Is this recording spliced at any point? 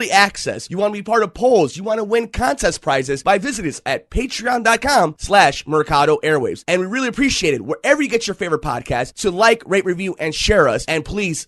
no; 0 cuts

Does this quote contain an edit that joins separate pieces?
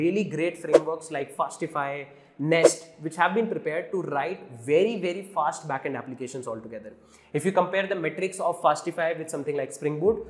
no; 0 cuts

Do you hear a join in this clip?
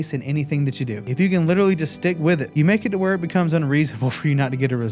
yes; 2 cuts; at 1.1 s, 2.5 s

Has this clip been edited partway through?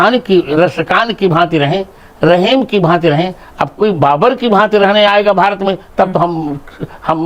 no; 0 cuts

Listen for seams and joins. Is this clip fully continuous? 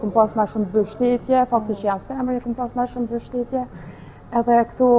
yes; 0 cuts

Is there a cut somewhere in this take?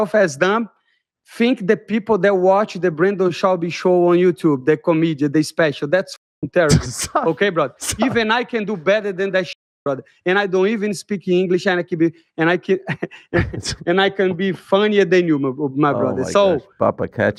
no; 0 cuts

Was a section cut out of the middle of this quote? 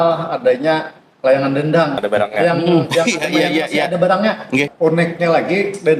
yes; 2 cuts; at 2.0 s, 4.7 s

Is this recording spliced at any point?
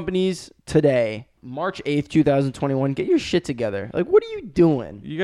no; 0 cuts

